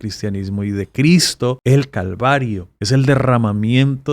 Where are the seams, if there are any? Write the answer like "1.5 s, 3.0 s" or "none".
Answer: 1.6 s, 2.7 s

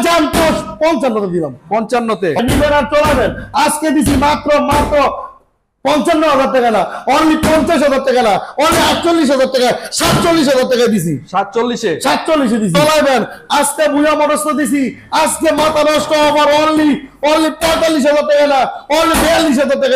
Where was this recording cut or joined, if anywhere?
2.4 s, 12.7 s

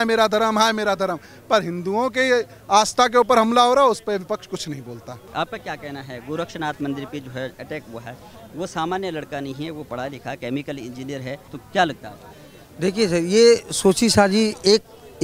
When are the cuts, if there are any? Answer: none

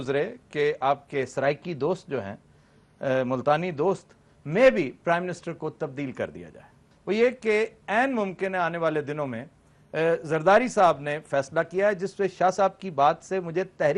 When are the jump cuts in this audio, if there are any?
6.9 s

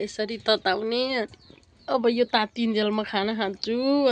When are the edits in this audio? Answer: none

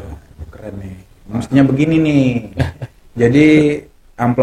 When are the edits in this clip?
none

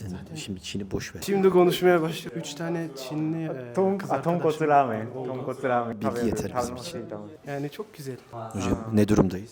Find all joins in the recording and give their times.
none

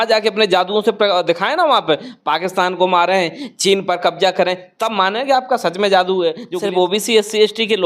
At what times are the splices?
6.5 s

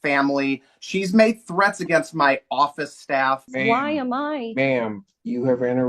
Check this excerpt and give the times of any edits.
3.5 s

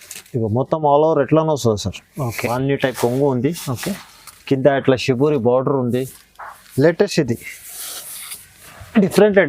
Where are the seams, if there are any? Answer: 2.4 s

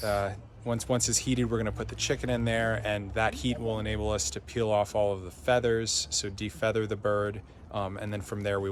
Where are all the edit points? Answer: none

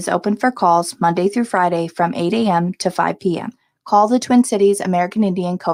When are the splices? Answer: none

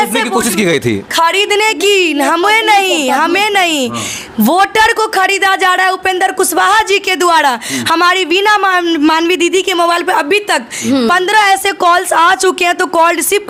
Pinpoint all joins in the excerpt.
none

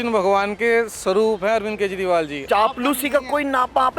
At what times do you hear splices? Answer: 2.4 s

